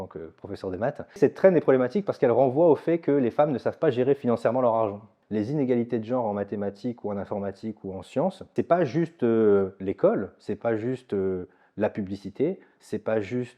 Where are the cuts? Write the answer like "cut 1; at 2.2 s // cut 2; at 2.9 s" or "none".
cut 1; at 1.1 s // cut 2; at 5.2 s // cut 3; at 8.5 s